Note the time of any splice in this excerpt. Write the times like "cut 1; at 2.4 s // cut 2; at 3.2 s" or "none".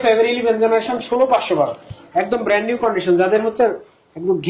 none